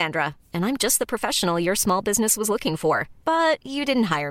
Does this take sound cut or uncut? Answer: uncut